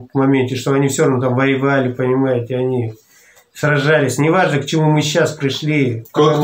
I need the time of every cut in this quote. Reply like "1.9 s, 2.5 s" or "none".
none